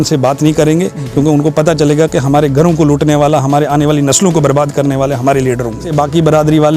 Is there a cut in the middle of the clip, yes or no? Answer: yes